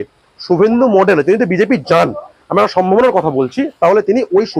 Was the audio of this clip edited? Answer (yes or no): no